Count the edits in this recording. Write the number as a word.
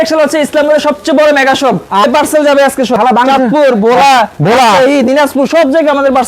two